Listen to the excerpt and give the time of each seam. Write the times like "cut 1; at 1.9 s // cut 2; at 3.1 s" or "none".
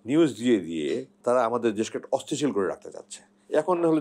cut 1; at 1.1 s